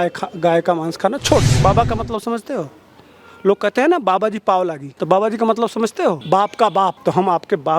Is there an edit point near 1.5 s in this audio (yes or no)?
yes